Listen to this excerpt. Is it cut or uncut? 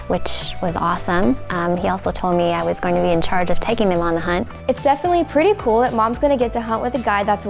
uncut